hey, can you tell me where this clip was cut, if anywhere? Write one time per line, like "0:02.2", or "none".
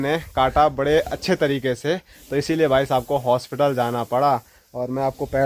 none